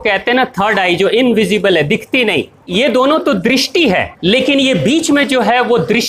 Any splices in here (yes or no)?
yes